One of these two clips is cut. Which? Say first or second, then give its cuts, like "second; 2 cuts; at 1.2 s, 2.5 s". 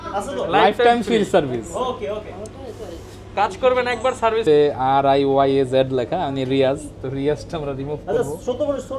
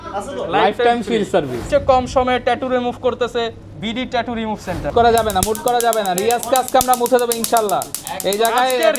second; 2 cuts; at 1.6 s, 4.9 s